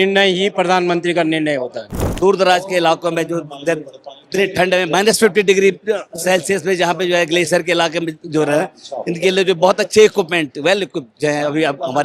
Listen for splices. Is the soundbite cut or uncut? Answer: cut